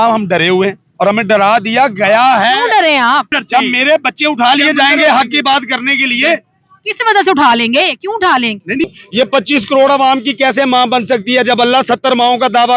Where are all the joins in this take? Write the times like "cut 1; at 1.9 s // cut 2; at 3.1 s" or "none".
cut 1; at 3.3 s // cut 2; at 8.8 s